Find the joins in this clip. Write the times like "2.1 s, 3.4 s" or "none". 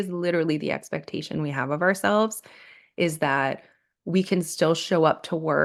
none